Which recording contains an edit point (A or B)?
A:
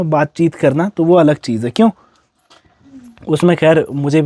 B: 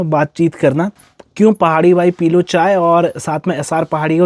B